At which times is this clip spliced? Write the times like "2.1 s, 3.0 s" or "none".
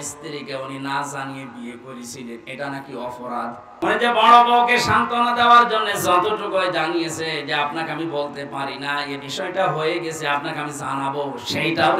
3.8 s

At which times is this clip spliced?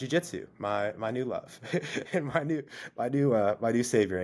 none

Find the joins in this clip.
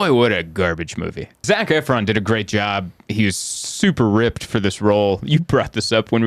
1.4 s

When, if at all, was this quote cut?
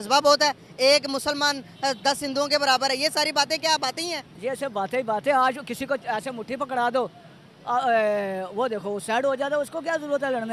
none

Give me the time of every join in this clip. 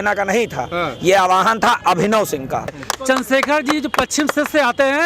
2.7 s

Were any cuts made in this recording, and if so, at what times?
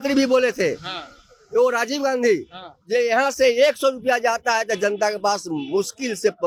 none

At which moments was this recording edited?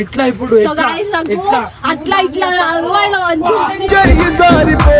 3.9 s

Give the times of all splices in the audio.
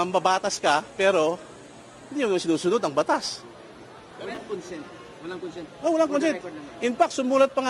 4.4 s

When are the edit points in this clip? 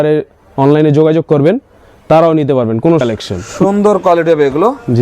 3.0 s

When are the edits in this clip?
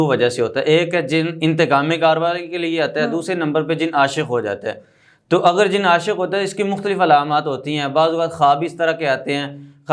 none

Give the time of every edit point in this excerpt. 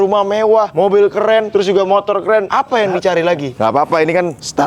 3.5 s

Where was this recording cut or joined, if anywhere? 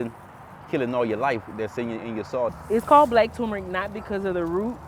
2.6 s

